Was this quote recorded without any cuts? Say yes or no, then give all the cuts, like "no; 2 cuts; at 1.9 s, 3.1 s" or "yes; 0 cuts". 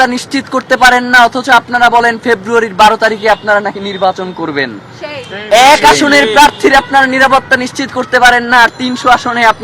yes; 0 cuts